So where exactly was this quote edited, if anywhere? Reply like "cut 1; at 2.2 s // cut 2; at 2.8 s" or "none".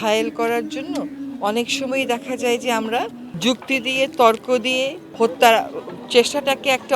cut 1; at 5.1 s